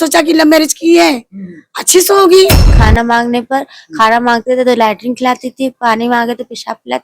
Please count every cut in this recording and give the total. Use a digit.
1